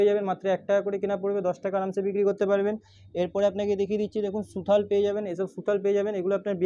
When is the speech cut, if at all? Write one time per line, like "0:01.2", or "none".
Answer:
none